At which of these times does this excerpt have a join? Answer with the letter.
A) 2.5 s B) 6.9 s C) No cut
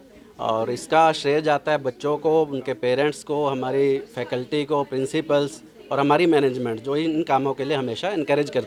C